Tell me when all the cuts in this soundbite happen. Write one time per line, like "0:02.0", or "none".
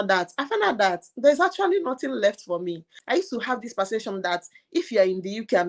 0:02.9